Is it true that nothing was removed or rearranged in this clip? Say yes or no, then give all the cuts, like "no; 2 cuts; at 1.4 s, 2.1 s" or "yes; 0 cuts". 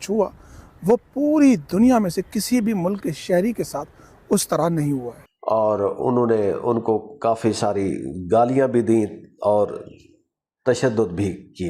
yes; 0 cuts